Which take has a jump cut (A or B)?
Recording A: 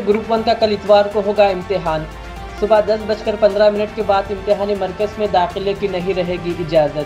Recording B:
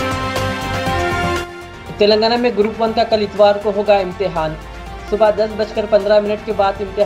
B